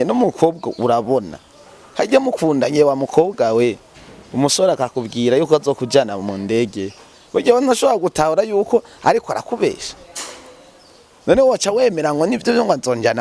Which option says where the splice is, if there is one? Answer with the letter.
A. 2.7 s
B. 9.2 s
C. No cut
C